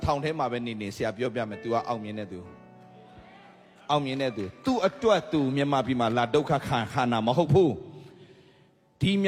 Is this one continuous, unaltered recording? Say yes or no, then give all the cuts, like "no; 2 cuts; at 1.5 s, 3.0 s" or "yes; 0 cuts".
yes; 0 cuts